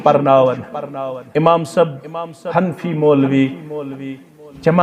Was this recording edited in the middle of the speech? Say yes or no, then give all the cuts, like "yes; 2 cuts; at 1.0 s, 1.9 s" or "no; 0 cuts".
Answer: no; 0 cuts